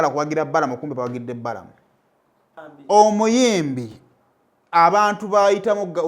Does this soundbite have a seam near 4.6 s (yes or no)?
no